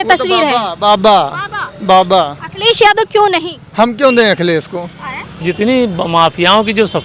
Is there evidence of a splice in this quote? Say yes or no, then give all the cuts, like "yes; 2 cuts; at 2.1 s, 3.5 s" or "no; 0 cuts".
yes; 2 cuts; at 2.4 s, 5.4 s